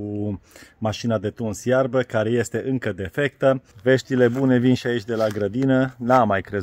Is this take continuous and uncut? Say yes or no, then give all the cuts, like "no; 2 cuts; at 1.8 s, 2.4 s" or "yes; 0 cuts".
no; 1 cut; at 3.7 s